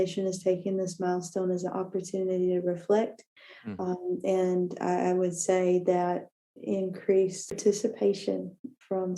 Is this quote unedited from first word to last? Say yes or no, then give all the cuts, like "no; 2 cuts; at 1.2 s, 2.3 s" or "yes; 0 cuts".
no; 1 cut; at 7.6 s